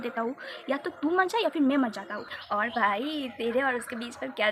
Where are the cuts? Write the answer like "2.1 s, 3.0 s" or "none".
2.2 s